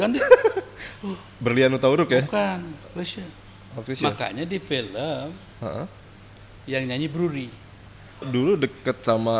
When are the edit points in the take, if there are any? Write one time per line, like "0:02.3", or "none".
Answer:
0:08.3